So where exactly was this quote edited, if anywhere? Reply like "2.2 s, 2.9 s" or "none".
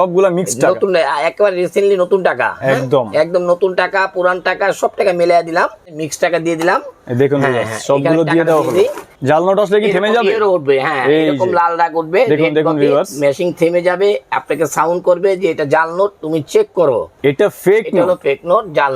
5.9 s, 9.1 s, 17.1 s